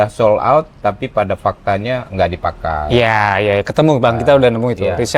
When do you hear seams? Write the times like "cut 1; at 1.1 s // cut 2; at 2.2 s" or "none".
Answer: none